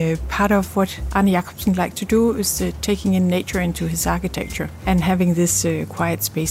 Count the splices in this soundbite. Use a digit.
2